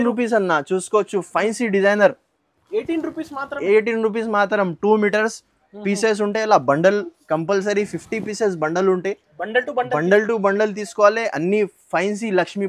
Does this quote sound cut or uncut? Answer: uncut